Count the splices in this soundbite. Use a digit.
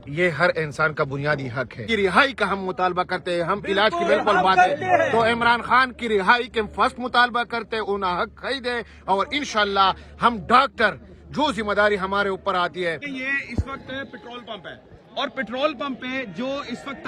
2